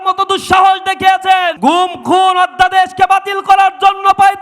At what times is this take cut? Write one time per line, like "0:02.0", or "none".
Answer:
0:01.5